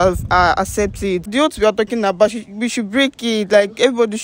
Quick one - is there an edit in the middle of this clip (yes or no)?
yes